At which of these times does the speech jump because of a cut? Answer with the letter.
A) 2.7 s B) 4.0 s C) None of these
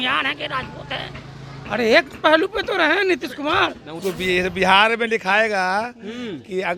B